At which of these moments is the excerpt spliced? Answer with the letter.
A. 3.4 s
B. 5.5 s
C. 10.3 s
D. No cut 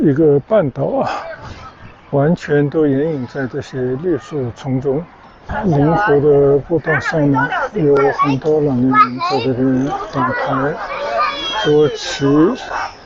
B